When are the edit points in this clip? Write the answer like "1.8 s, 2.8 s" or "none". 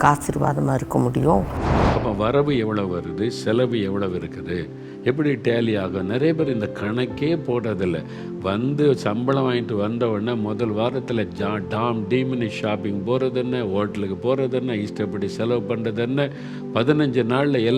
1.6 s